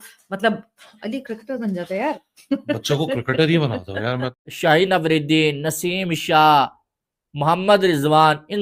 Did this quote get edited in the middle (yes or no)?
yes